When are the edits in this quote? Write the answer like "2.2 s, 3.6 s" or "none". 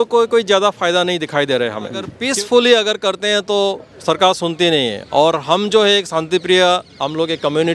2.2 s